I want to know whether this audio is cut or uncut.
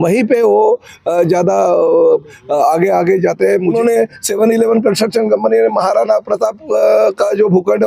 cut